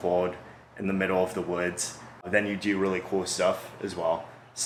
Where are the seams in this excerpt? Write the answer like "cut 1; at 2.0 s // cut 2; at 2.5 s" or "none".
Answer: none